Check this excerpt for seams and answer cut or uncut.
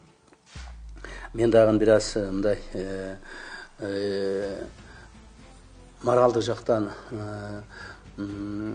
uncut